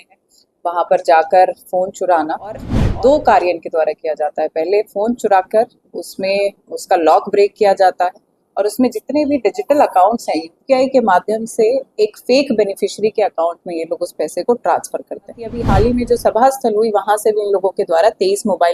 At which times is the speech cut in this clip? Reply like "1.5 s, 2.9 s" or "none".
2.8 s, 15.6 s